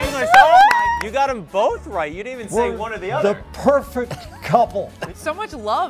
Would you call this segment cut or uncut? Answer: cut